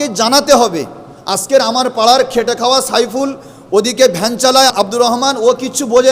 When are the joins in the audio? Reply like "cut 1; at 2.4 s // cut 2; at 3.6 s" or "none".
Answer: cut 1; at 4.7 s